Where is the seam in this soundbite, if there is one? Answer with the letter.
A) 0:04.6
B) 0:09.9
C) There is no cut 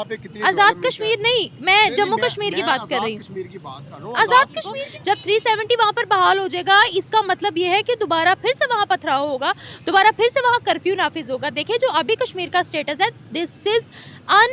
A